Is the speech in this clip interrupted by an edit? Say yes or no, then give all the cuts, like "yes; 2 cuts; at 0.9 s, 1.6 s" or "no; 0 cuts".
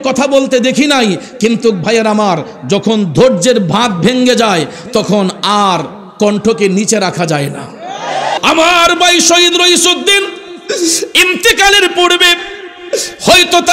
yes; 1 cut; at 8.4 s